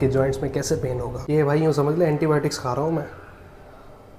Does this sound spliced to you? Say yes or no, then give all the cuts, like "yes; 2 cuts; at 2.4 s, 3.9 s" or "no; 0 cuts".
yes; 1 cut; at 1.1 s